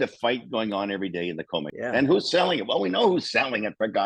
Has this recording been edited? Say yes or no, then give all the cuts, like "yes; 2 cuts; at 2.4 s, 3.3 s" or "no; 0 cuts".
yes; 1 cut; at 1.7 s